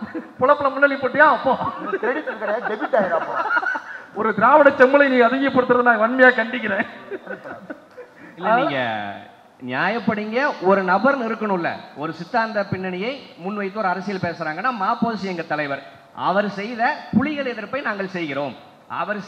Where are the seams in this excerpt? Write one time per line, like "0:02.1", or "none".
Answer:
none